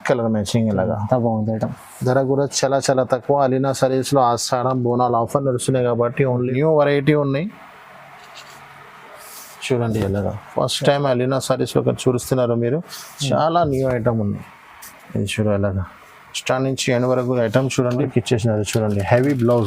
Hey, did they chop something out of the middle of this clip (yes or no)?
yes